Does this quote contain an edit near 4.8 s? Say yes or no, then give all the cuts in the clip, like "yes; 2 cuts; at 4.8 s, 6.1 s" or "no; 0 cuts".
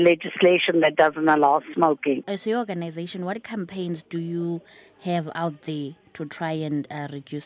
no; 1 cut; at 2.2 s